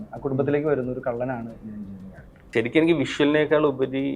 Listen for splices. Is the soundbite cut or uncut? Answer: cut